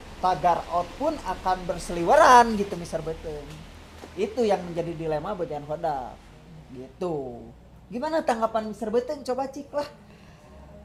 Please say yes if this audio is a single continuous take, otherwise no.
yes